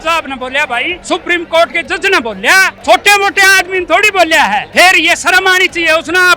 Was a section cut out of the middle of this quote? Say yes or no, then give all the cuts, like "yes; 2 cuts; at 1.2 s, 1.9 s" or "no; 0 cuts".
yes; 3 cuts; at 1.0 s, 2.7 s, 4.7 s